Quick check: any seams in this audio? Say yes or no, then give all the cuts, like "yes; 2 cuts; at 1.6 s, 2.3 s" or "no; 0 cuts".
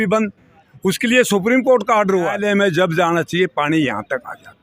yes; 1 cut; at 2.4 s